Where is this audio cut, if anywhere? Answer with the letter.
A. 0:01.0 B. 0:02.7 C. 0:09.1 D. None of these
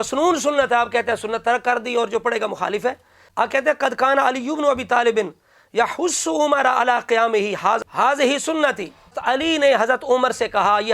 C